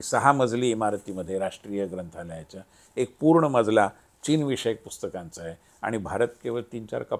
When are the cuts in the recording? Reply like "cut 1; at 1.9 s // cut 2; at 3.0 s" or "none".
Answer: none